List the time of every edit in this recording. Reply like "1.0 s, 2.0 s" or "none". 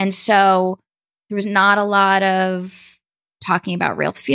none